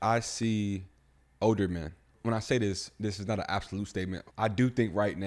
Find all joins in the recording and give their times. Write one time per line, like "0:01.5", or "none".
0:01.2
0:02.1
0:04.2